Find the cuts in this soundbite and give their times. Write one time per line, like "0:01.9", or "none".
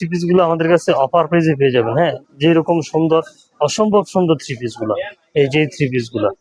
none